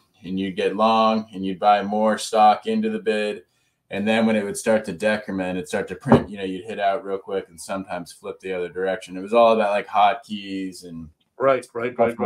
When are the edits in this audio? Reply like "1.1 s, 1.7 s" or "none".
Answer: none